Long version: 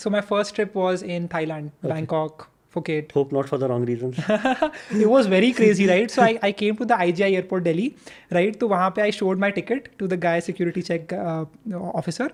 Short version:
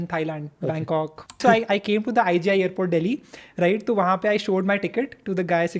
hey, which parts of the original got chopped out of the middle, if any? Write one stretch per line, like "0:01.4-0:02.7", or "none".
0:02.6-0:06.1